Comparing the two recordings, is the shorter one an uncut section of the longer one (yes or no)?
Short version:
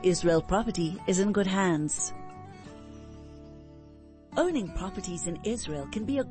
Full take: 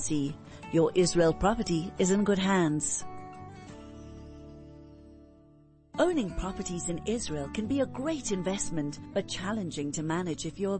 no